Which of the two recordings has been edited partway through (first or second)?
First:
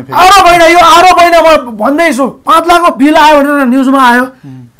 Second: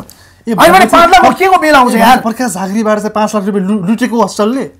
first